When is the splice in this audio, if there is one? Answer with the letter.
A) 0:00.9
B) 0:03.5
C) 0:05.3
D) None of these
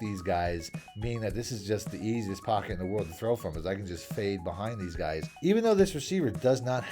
C